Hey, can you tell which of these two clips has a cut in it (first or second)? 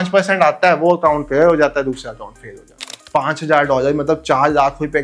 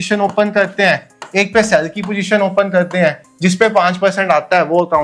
first